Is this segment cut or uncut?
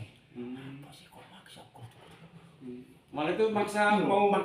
uncut